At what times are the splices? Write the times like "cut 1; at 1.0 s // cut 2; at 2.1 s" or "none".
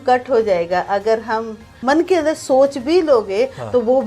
cut 1; at 1.8 s